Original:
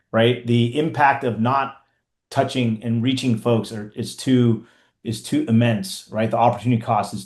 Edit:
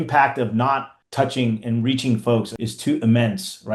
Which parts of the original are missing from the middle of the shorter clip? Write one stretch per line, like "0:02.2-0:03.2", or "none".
0:01.8-0:02.2
0:03.8-0:05.1